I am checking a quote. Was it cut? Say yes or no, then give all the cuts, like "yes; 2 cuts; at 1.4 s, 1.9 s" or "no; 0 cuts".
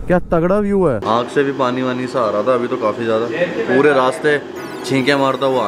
yes; 1 cut; at 1.0 s